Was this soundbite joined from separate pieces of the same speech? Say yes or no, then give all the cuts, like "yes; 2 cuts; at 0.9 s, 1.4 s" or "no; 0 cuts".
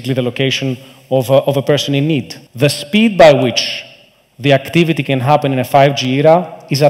yes; 1 cut; at 2.4 s